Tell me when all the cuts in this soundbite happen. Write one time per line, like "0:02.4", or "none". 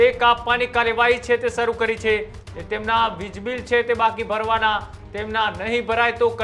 0:02.4